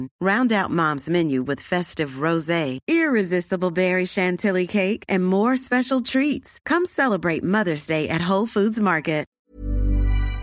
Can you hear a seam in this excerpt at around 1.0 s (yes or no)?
no